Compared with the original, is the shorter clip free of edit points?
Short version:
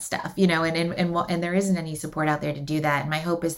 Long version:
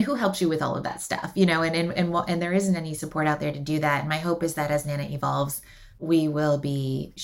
yes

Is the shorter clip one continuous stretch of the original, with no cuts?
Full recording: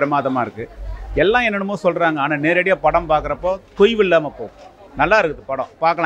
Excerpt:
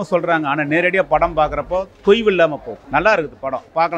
no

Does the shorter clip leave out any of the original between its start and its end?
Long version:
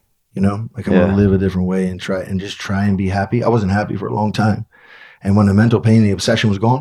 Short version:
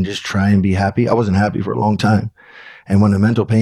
no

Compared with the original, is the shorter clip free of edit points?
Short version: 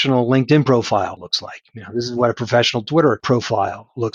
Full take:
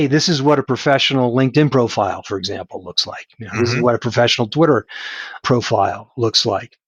no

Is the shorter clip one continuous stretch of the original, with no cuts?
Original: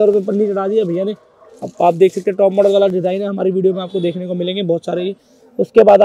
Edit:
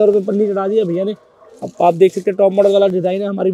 yes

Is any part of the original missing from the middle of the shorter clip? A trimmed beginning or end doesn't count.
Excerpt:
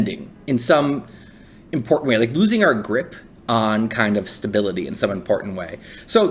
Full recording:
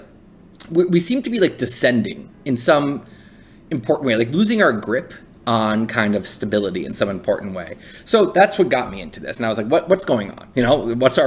no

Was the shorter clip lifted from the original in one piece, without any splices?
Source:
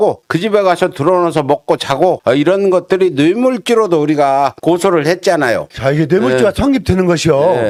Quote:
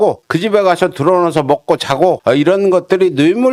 yes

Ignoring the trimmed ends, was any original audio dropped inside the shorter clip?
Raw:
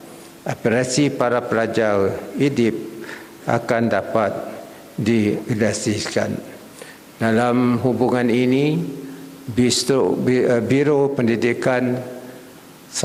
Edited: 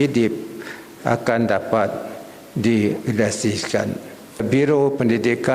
yes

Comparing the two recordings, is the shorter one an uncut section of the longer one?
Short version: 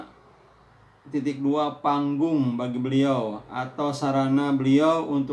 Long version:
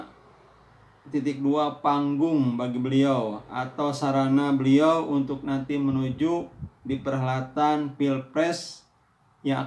yes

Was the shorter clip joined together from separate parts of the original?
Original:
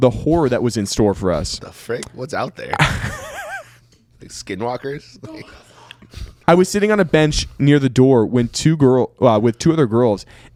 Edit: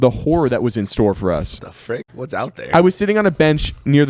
yes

